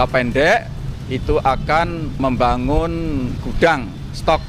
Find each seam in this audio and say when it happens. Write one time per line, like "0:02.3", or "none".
0:02.2